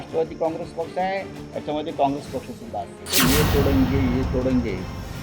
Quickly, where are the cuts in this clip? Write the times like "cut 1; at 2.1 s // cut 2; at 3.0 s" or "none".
cut 1; at 3.2 s